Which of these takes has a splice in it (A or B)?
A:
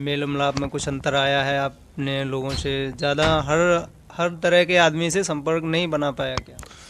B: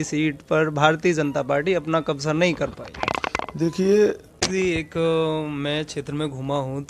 B